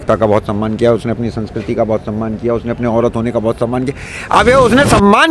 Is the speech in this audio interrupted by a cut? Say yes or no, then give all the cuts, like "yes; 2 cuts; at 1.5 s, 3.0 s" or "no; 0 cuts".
no; 0 cuts